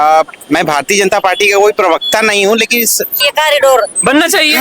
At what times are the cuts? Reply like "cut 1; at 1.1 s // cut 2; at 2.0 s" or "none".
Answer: cut 1; at 3.2 s

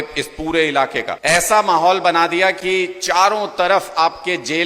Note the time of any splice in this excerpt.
cut 1; at 1.1 s

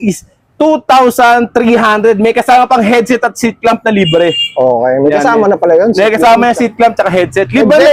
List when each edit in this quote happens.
none

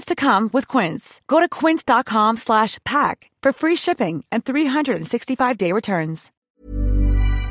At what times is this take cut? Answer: cut 1; at 6.4 s

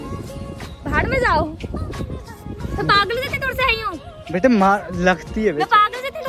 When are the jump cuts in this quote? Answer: none

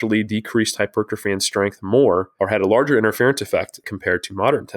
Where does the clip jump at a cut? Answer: cut 1; at 2.3 s // cut 2; at 3.9 s

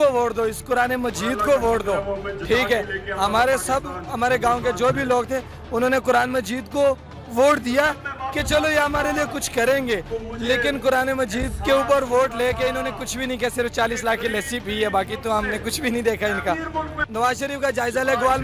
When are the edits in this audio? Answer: cut 1; at 17.0 s

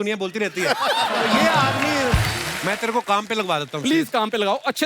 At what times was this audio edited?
cut 1; at 2.5 s

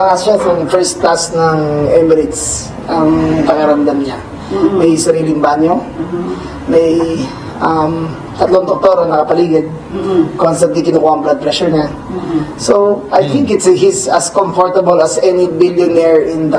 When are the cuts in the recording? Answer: none

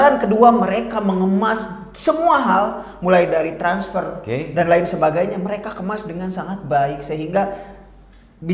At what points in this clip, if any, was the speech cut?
none

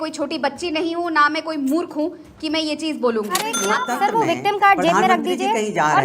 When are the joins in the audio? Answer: cut 1; at 3.5 s

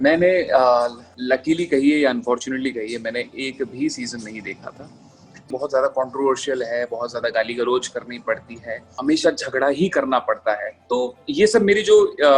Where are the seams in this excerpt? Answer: cut 1; at 1.1 s // cut 2; at 5.5 s // cut 3; at 8.9 s // cut 4; at 10.7 s

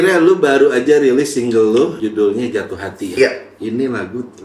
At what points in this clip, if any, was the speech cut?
cut 1; at 2.0 s // cut 2; at 3.5 s

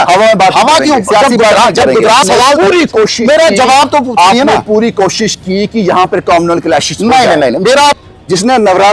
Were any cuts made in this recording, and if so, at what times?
cut 1; at 2.2 s // cut 2; at 8.0 s

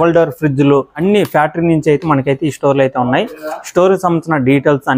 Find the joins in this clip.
cut 1; at 0.9 s

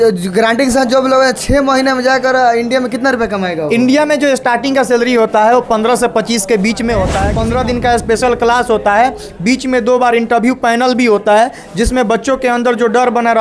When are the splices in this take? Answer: cut 1; at 7.3 s

